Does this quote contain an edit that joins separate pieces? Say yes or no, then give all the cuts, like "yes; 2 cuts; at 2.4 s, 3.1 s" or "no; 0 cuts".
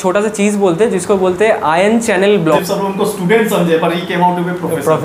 yes; 1 cut; at 2.6 s